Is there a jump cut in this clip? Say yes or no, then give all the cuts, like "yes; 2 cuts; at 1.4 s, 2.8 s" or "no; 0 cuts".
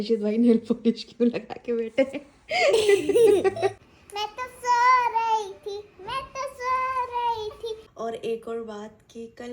yes; 2 cuts; at 3.8 s, 7.9 s